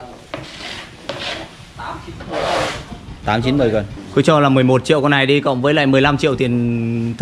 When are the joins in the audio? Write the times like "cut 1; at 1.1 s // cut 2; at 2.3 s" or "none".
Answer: cut 1; at 4.0 s